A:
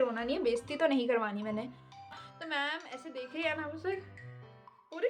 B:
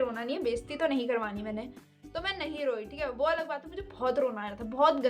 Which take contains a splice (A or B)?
A